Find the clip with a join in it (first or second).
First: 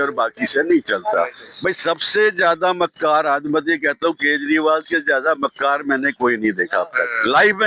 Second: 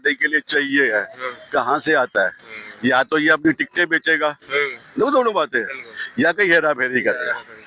first